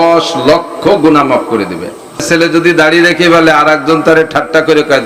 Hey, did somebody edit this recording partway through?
yes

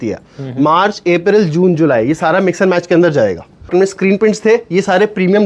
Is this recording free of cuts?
no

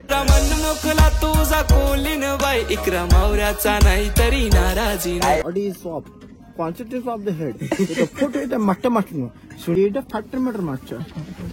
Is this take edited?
yes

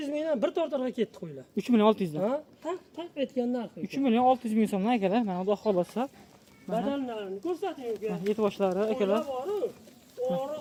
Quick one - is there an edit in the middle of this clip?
no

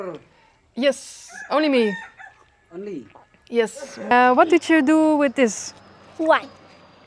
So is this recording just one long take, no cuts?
no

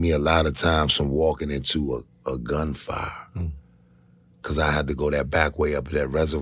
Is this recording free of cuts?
yes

